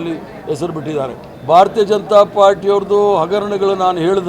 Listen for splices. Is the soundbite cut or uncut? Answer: cut